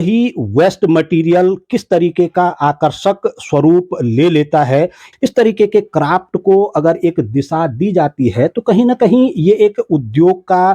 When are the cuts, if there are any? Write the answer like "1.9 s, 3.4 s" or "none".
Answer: 5.1 s